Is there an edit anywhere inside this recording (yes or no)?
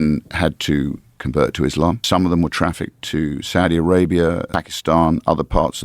yes